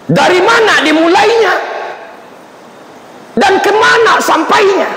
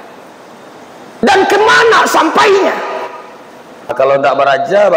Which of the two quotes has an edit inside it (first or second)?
second